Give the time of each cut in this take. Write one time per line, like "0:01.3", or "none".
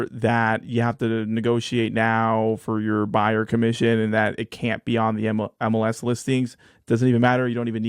none